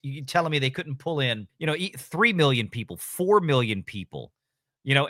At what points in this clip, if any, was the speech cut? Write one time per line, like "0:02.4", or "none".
none